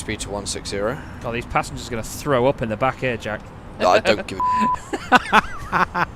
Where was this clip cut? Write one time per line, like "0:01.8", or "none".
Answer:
none